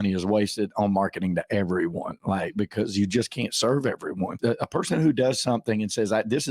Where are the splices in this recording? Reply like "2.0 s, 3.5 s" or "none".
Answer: 4.3 s